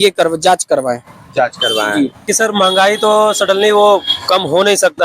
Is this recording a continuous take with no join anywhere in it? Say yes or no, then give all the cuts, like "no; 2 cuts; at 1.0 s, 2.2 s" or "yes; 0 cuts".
no; 1 cut; at 2.3 s